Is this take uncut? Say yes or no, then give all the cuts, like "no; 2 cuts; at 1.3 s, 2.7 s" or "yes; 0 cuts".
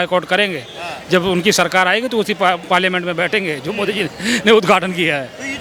yes; 0 cuts